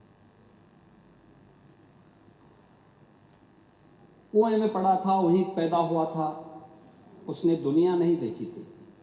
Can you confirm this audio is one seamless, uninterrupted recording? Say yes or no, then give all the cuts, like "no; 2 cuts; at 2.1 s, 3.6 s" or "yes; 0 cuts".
yes; 0 cuts